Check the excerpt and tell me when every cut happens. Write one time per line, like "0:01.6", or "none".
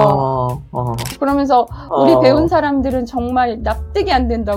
0:01.1